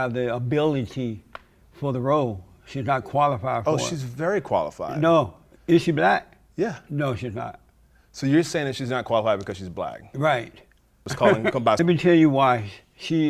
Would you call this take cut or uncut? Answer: cut